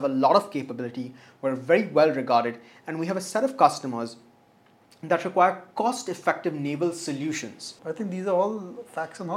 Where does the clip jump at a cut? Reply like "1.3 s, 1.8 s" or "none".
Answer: 7.7 s